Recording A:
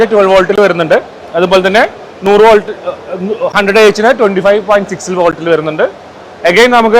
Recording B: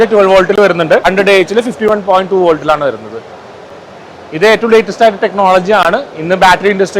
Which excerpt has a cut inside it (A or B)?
B